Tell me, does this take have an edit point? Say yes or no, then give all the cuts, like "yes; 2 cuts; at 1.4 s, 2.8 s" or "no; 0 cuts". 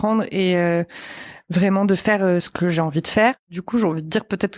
yes; 2 cuts; at 2.5 s, 3.6 s